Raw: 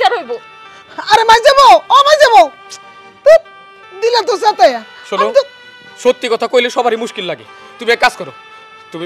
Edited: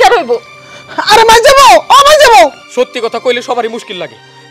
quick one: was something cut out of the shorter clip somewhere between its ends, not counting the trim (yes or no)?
yes